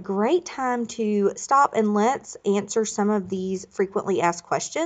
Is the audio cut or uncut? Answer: uncut